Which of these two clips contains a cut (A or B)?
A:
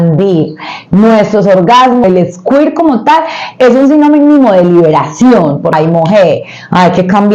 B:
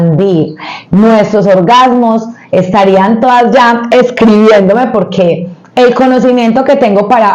A